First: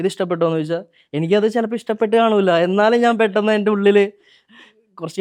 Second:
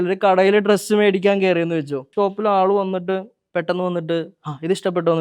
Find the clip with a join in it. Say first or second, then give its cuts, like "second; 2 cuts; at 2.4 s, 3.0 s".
second; 2 cuts; at 2.0 s, 3.4 s